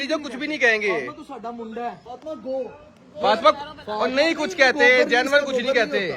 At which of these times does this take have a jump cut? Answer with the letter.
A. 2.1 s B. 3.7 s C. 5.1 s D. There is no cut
A